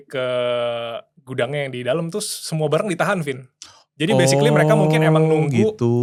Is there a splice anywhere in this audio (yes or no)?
no